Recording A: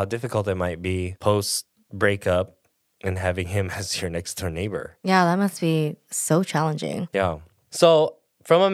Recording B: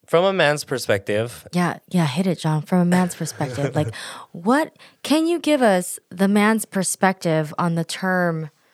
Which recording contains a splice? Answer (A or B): A